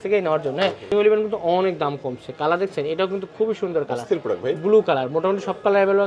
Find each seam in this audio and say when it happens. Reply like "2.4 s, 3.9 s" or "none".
0.9 s